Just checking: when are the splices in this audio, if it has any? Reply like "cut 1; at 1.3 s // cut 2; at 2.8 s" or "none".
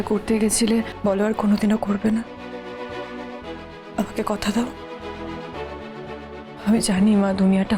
cut 1; at 0.9 s